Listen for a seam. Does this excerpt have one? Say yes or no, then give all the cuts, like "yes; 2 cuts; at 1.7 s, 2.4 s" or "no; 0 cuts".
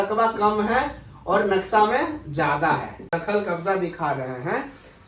yes; 1 cut; at 3.1 s